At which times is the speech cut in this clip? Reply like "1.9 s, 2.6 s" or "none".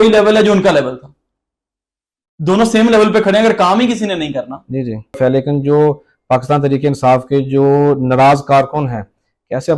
5.2 s